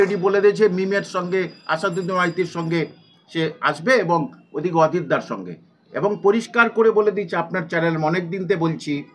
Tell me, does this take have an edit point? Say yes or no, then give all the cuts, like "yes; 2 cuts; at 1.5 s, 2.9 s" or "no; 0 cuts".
no; 0 cuts